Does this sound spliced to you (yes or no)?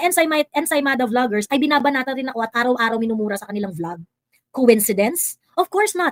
no